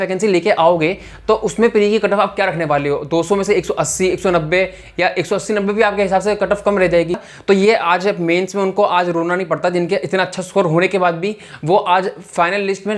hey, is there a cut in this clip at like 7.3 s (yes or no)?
yes